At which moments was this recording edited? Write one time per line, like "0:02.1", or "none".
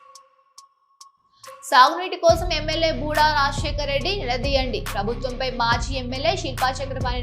0:01.7